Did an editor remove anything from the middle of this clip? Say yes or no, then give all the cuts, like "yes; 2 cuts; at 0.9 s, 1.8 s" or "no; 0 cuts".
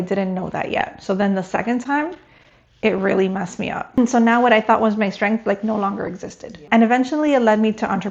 yes; 2 cuts; at 4.0 s, 6.6 s